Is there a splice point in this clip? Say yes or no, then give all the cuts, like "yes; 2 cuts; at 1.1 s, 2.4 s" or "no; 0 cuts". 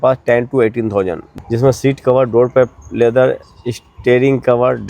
yes; 1 cut; at 1.3 s